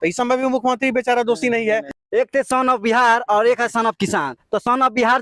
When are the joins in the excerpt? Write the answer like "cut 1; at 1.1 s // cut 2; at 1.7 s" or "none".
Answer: cut 1; at 2.0 s